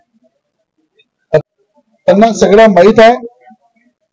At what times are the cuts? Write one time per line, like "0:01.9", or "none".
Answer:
0:01.4